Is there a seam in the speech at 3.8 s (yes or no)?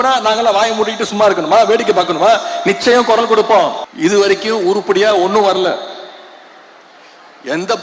yes